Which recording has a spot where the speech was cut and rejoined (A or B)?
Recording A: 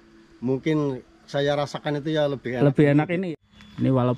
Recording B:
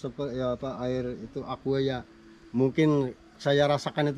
A